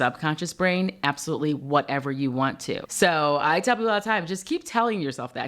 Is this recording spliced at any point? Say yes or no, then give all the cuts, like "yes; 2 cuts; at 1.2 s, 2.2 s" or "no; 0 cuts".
yes; 1 cut; at 2.9 s